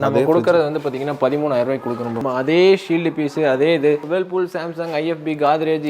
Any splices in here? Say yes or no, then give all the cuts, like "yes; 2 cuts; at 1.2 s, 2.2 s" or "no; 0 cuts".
yes; 2 cuts; at 2.2 s, 4.0 s